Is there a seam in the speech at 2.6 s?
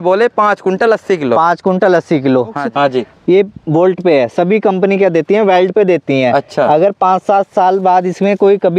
yes; 1 cut; at 2.6 s

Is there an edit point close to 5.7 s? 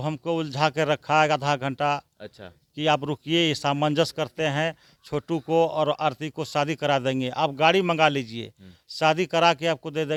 no; 0 cuts

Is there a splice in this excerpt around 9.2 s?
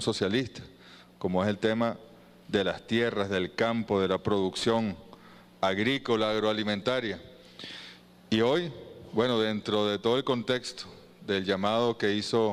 no; 1 cut; at 6.8 s

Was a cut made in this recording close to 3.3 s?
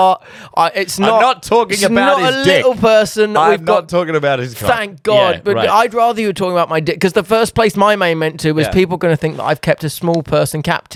no; 0 cuts

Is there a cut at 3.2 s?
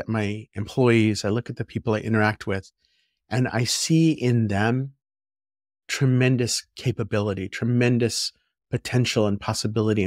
no; 0 cuts

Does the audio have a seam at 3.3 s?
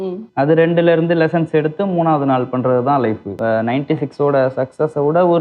yes; 1 cut; at 3.3 s

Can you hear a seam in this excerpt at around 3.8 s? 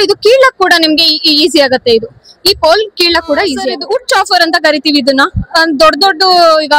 yes; 1 cut; at 3.8 s

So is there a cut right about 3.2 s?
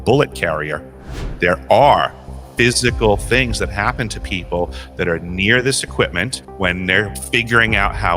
no; 3 cuts; at 1.2 s, 6.4 s, 7.2 s

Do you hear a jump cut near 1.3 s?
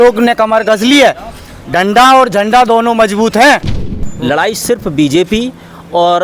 no; 1 cut; at 3.8 s

